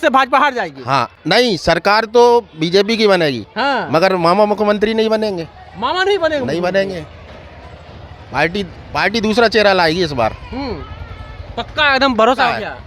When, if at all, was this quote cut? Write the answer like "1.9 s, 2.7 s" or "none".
none